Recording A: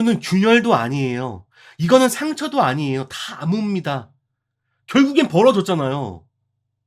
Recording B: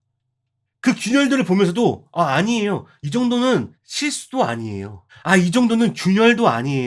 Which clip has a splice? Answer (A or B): B